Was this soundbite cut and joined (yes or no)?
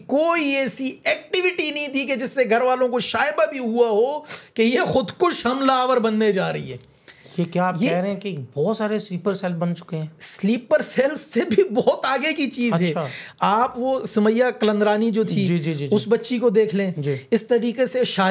no